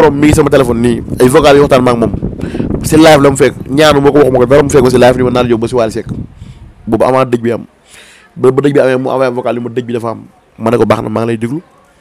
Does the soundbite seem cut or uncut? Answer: uncut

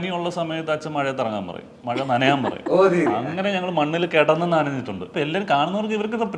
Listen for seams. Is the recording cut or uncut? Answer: cut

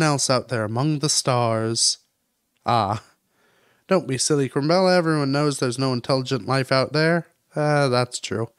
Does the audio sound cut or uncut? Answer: uncut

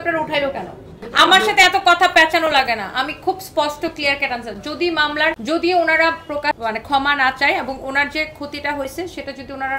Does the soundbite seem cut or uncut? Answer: cut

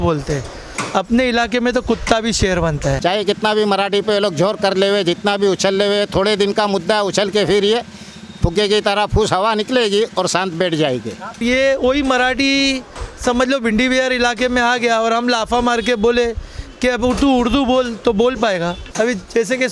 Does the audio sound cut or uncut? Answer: cut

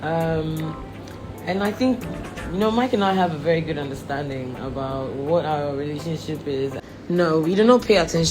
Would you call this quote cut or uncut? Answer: cut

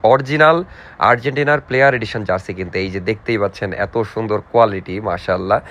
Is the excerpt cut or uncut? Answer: uncut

